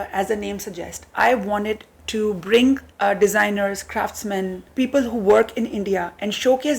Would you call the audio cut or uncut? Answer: cut